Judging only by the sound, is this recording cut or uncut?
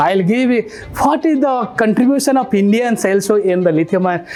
uncut